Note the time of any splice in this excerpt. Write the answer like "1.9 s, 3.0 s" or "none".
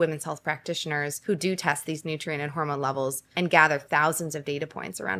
1.1 s, 3.2 s